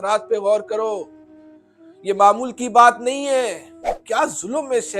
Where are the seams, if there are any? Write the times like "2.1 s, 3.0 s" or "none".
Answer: 3.9 s